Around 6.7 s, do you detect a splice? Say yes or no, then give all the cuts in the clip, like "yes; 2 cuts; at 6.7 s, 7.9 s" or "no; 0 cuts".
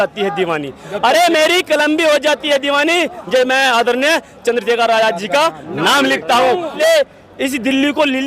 yes; 1 cut; at 6.7 s